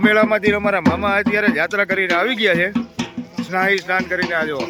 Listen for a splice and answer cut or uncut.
uncut